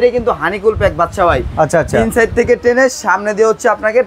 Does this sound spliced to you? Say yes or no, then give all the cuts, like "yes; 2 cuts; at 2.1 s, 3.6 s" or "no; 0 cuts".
no; 0 cuts